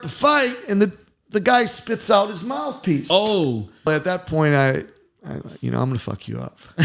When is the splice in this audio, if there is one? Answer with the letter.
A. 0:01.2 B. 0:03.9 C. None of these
B